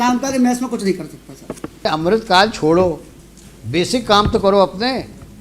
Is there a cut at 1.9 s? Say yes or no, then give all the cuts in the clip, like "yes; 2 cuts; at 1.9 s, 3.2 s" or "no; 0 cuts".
yes; 1 cut; at 1.9 s